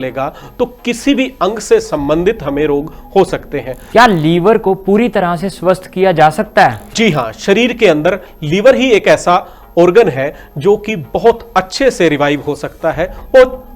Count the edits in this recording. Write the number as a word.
two